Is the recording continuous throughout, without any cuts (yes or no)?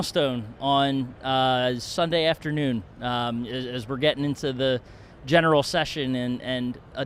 yes